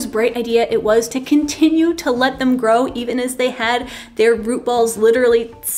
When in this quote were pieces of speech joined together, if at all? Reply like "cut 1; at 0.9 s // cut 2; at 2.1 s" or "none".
cut 1; at 1.2 s